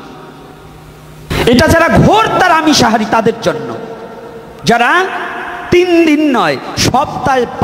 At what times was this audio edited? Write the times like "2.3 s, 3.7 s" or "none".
1.3 s